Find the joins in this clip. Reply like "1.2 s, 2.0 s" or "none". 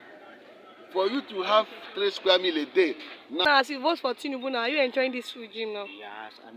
3.4 s

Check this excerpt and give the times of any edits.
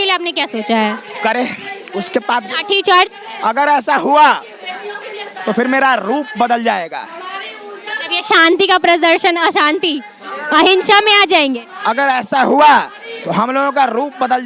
none

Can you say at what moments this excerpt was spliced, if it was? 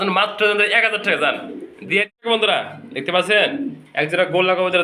2.2 s

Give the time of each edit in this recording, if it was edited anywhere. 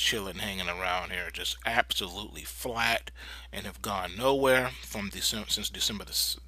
none

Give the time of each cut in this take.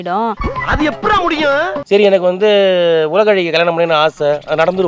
1.8 s

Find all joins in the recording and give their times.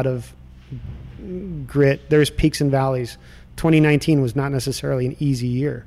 none

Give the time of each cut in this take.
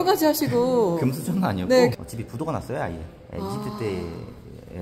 1.9 s

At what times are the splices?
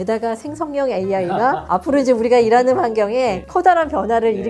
1.6 s, 3.4 s

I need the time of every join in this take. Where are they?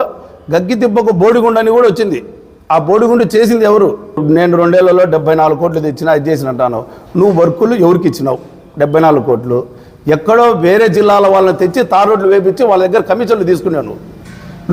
4.2 s

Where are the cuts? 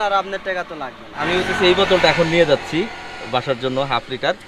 1.1 s

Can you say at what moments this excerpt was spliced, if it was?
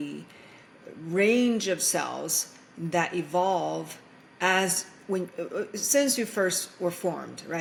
none

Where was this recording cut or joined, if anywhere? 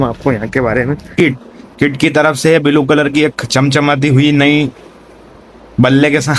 1.1 s

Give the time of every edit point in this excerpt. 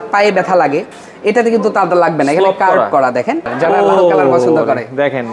3.6 s

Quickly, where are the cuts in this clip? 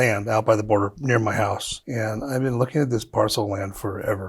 1.8 s

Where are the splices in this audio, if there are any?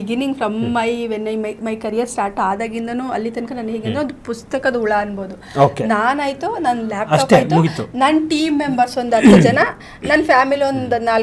none

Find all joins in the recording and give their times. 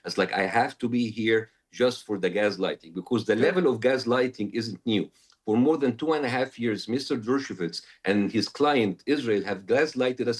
none

